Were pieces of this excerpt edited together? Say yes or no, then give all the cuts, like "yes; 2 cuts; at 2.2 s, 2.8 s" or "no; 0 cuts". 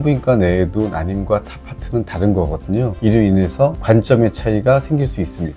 no; 0 cuts